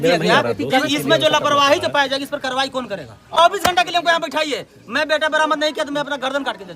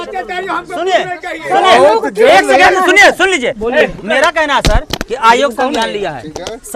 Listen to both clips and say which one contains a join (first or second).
first